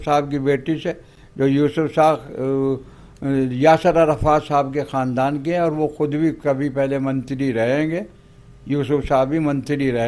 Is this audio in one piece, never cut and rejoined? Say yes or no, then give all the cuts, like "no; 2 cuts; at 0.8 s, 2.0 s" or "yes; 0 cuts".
yes; 0 cuts